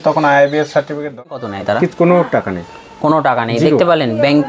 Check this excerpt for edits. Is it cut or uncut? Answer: cut